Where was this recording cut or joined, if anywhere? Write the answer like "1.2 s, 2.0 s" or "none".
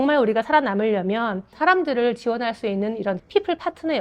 1.5 s, 3.2 s